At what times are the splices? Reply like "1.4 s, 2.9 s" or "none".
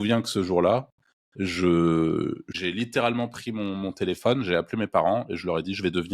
2.5 s